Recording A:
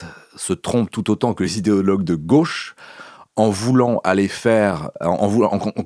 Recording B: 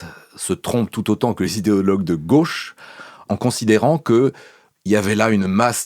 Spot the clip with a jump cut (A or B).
B